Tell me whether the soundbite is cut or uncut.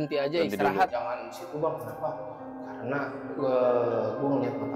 cut